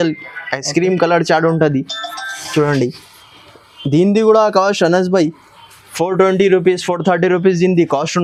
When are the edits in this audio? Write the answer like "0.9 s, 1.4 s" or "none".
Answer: none